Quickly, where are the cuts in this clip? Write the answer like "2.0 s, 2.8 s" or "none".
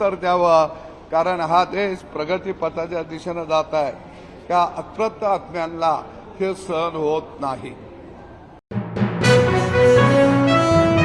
none

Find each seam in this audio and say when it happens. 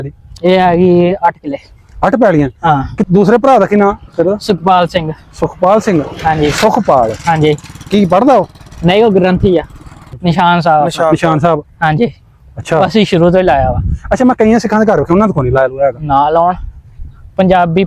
3.1 s, 10.1 s

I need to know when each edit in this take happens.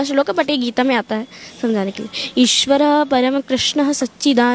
none

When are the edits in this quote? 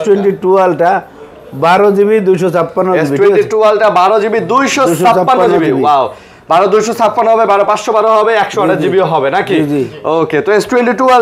none

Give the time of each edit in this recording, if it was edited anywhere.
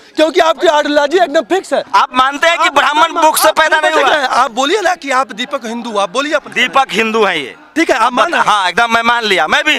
1.9 s

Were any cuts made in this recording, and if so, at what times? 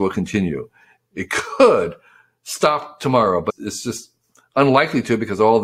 3.5 s

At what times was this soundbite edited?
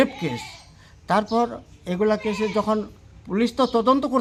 none

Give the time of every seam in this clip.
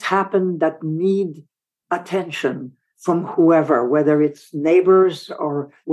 none

